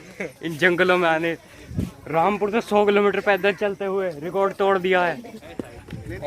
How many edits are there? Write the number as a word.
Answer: one